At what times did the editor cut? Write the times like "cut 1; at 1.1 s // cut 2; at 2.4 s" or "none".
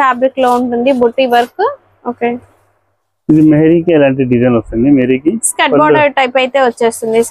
none